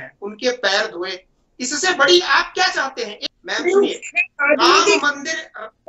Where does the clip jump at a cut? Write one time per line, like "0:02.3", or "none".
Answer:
0:03.1